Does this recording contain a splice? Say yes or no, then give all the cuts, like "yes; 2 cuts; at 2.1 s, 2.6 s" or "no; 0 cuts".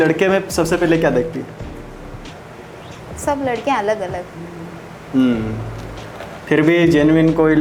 no; 0 cuts